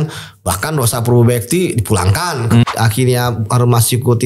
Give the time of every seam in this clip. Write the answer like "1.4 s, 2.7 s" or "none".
2.6 s